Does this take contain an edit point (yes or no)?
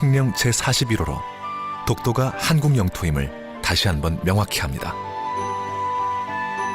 yes